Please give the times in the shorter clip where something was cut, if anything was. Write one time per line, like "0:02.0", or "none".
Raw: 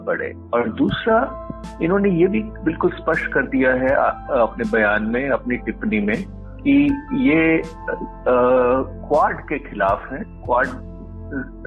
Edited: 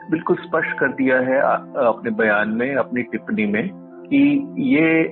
none